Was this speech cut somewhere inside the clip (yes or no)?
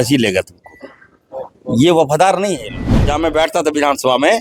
yes